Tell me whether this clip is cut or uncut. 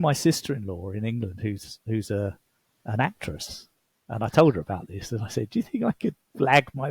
uncut